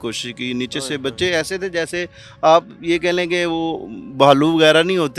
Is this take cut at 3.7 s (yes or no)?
no